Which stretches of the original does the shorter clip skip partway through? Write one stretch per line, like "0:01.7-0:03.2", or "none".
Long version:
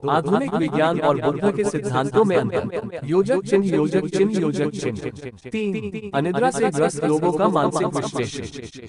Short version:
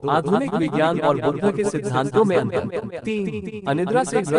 0:02.9-0:05.4